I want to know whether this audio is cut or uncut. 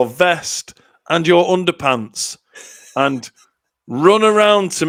uncut